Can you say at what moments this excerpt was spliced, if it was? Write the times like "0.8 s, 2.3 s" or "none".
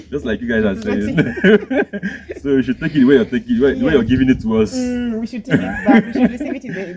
none